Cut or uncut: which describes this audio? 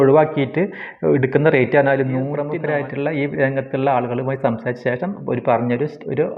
cut